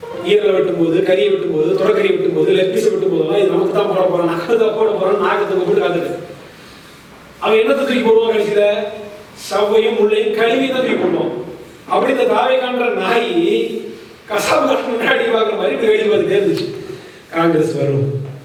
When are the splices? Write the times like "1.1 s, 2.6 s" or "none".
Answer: none